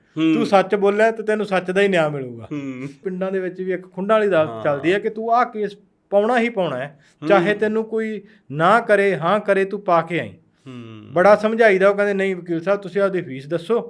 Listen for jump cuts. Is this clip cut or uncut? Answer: cut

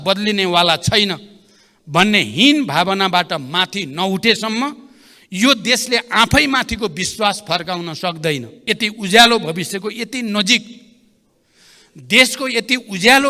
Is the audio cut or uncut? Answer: cut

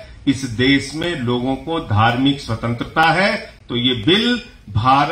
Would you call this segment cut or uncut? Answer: cut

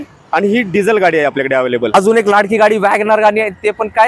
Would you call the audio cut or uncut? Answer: cut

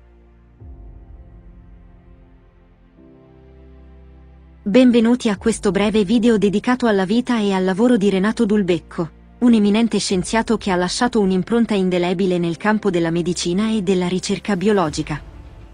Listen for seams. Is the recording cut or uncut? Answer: cut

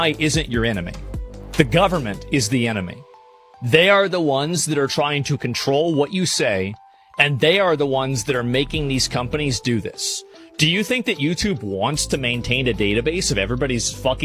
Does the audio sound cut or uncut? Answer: uncut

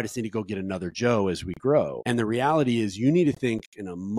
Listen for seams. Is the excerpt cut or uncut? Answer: cut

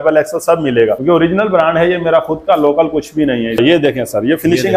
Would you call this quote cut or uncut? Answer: cut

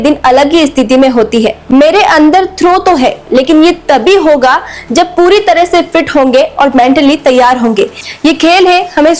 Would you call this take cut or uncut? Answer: cut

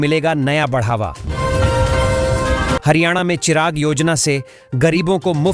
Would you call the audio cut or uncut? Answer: cut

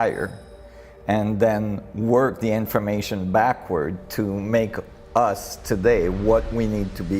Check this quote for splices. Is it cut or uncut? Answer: uncut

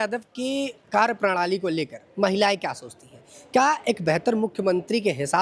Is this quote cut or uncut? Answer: uncut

